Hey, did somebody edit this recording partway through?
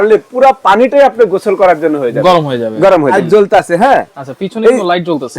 yes; 1 cut; at 3.1 s

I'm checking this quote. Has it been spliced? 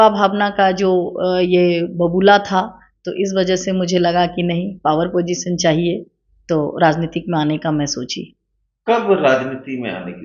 no; 0 cuts

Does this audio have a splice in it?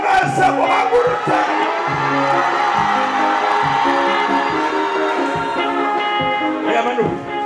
no; 0 cuts

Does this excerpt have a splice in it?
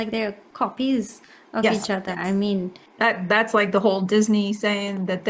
yes; 1 cut; at 2.8 s

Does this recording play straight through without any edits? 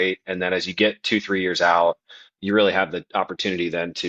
no; 1 cut; at 2.3 s

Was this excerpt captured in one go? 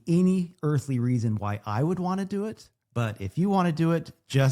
yes; 0 cuts

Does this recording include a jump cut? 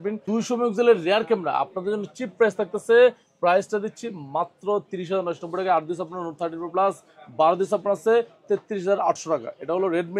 no; 0 cuts

